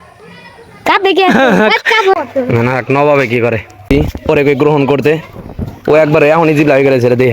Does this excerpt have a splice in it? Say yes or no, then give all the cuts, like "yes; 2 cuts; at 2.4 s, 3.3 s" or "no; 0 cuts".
yes; 2 cuts; at 2.2 s, 3.9 s